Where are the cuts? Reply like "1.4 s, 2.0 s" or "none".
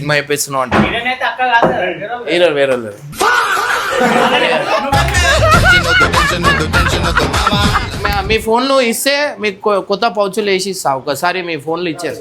7.9 s